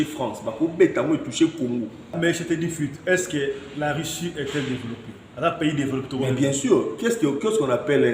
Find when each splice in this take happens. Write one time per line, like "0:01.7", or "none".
0:02.2